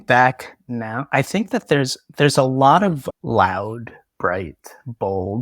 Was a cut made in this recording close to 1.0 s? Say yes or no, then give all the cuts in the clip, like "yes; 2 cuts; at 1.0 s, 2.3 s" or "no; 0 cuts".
yes; 2 cuts; at 1.0 s, 3.1 s